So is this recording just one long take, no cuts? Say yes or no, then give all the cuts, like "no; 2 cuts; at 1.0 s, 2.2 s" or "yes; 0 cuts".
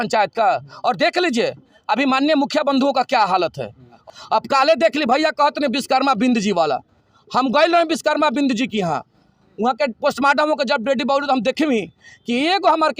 no; 1 cut; at 4.0 s